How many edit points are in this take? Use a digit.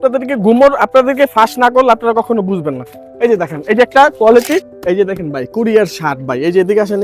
1